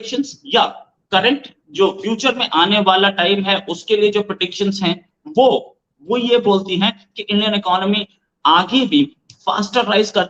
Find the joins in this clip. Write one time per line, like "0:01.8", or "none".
none